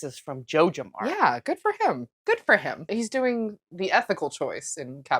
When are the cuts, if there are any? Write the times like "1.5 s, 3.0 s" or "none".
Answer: 2.1 s, 2.9 s